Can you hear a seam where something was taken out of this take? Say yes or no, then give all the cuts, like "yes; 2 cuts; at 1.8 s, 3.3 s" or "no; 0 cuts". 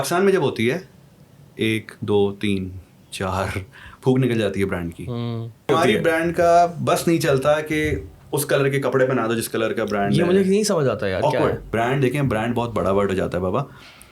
yes; 2 cuts; at 5.7 s, 11.7 s